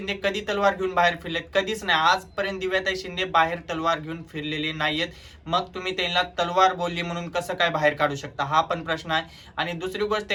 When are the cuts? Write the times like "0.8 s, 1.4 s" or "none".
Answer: none